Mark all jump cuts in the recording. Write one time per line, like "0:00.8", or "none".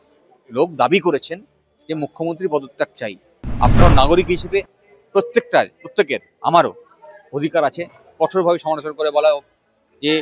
0:03.8